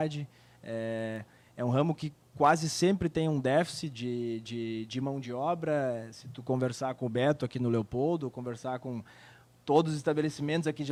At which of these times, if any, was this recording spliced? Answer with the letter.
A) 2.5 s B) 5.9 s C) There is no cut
C